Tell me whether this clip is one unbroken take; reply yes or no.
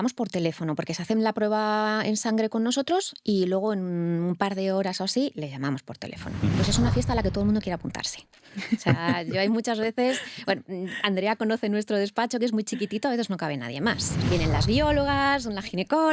no